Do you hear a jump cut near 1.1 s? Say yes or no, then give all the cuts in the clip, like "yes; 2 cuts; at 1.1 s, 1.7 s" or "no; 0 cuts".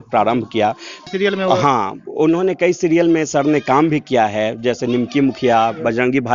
yes; 1 cut; at 1.1 s